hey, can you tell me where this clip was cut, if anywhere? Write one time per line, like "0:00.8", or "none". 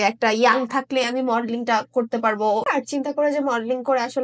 0:02.7